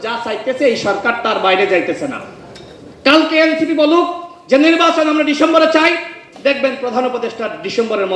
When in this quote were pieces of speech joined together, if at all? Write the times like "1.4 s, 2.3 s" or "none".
none